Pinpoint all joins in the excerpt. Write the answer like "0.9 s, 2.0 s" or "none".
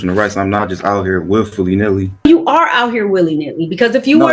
2.2 s

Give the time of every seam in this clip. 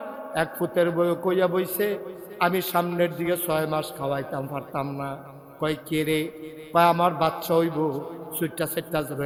none

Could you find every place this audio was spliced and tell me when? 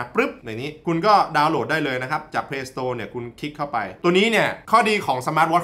none

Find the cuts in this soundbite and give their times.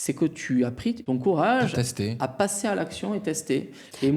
1.0 s

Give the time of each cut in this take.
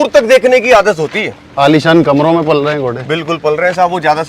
1.4 s

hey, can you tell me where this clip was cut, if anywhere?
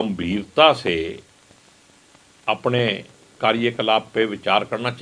none

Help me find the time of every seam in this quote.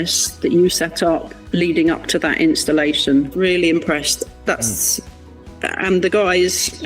3.3 s

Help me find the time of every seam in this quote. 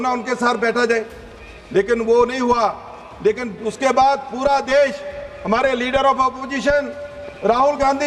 none

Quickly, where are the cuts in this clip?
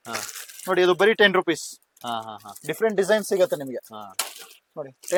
none

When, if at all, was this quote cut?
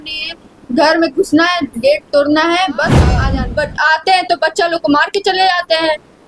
3.2 s

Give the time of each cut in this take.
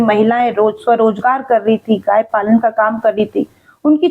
none

